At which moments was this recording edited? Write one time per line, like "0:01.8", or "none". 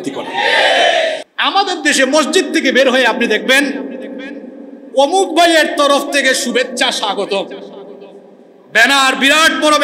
0:01.2